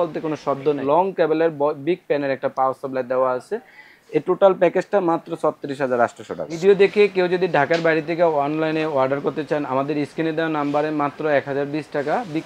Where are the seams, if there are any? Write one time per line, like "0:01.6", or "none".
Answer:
0:00.8
0:06.5